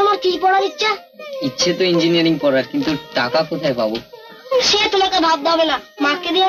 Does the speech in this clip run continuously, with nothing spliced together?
yes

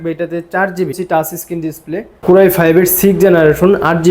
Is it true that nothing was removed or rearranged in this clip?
no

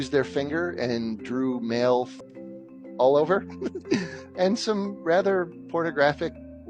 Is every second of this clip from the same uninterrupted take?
no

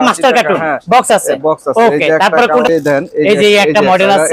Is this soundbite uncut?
yes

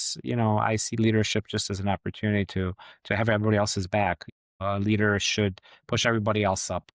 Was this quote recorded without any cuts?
no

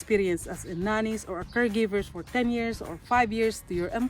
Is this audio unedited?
yes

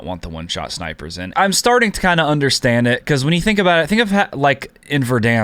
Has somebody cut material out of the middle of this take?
yes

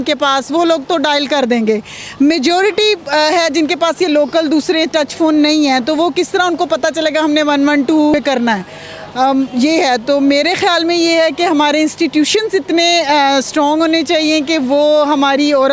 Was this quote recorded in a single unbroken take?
yes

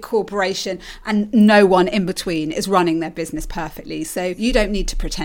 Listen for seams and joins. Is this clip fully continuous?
no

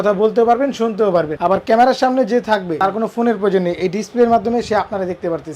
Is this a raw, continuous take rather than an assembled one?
no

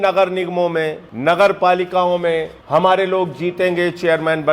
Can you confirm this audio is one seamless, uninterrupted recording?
no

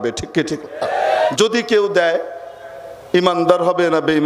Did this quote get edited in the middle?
yes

